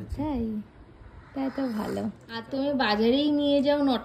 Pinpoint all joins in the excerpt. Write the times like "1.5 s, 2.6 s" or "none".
2.5 s

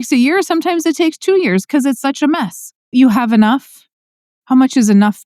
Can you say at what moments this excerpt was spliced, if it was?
2.9 s

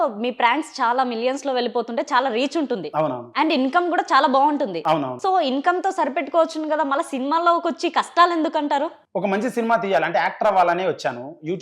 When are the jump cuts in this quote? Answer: none

